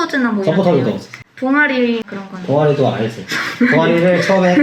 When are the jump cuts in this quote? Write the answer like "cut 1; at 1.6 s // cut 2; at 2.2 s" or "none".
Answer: none

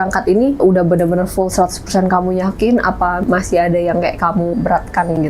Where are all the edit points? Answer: none

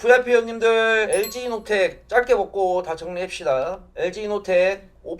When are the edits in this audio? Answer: cut 1; at 1.1 s

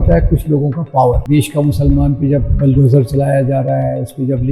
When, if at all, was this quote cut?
cut 1; at 1.2 s

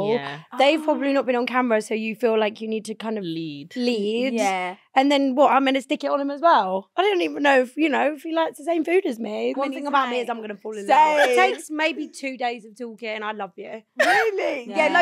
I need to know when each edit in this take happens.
cut 1; at 9.5 s

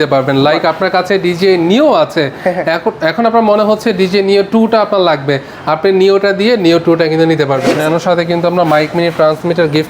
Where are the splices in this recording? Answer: cut 1; at 7.8 s

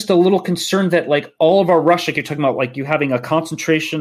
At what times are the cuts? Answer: none

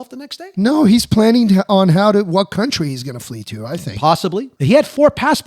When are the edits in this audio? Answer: cut 1; at 4.5 s

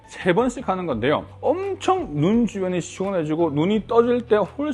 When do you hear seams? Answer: cut 1; at 1.3 s

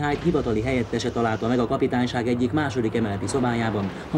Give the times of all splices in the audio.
none

